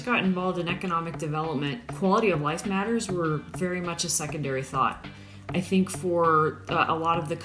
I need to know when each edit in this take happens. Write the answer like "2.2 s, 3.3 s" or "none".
1.9 s